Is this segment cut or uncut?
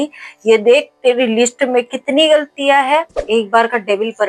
cut